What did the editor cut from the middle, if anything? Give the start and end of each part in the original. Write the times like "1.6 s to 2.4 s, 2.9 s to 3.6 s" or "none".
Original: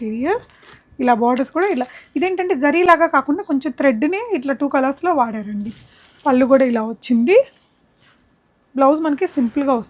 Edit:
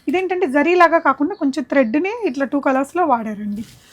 none